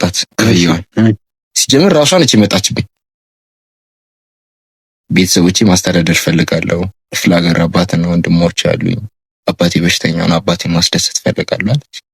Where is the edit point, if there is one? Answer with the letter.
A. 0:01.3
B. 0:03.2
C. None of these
A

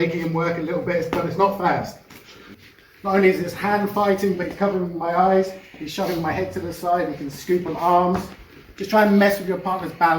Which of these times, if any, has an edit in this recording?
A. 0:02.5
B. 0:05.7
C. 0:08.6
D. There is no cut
A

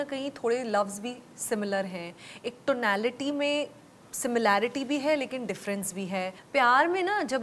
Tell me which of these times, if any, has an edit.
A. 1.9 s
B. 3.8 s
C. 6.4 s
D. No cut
C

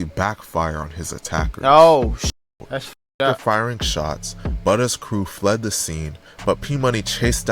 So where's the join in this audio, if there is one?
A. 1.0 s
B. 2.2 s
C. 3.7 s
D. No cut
B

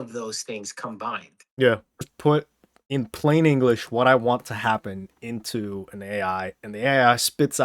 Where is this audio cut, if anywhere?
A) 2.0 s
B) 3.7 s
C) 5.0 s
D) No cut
A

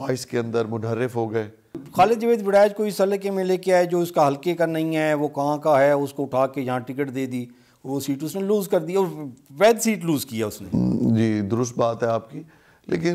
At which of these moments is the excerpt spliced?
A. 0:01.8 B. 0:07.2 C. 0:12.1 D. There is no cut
A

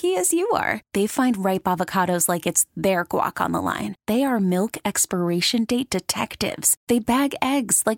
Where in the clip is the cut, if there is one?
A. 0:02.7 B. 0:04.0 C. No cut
C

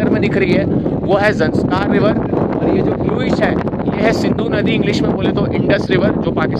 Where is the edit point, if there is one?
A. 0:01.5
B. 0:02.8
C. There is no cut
C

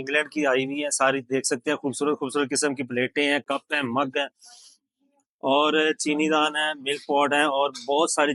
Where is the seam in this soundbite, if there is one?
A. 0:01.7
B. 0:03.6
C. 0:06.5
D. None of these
D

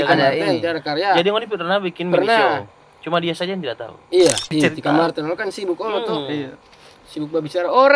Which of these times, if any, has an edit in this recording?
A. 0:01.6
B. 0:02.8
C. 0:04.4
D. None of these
C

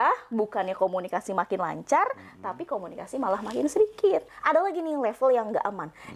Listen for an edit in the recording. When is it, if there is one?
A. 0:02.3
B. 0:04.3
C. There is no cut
B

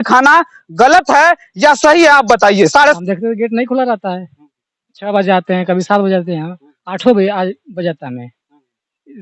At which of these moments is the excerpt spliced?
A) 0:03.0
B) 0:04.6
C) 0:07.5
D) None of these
A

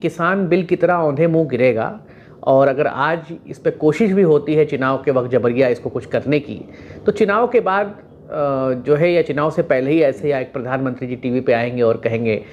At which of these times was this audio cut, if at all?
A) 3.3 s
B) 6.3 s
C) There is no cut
C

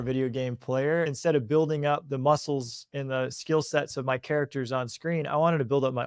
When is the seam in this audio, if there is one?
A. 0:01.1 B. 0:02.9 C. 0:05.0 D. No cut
A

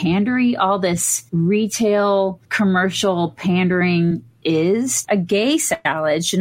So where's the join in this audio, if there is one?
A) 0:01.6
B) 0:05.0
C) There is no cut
B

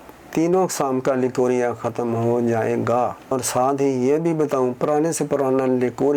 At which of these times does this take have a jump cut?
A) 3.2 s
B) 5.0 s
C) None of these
A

